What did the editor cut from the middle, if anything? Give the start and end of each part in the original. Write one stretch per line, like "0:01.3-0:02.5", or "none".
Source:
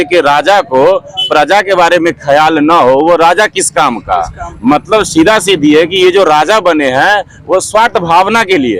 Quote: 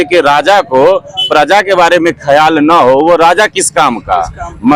none